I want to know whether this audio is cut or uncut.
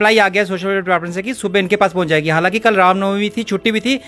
uncut